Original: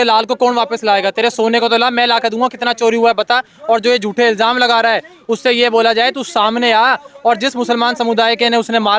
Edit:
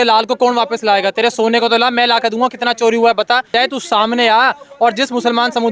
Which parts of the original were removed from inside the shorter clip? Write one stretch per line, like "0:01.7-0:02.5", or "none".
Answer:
0:03.5-0:06.0